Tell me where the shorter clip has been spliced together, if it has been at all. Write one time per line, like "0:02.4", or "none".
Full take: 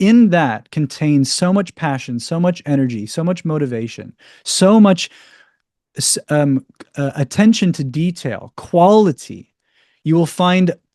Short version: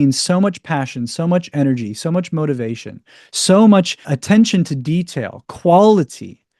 0:04.1